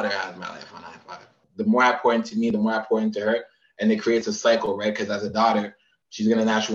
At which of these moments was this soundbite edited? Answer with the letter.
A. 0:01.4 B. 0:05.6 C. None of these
A